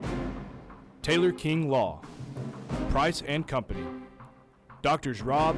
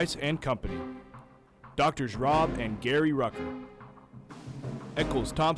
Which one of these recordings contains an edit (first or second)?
first